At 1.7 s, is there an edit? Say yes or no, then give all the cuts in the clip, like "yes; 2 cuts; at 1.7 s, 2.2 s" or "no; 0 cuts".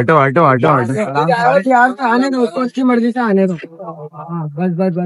no; 0 cuts